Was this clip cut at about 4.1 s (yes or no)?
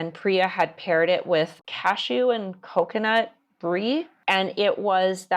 yes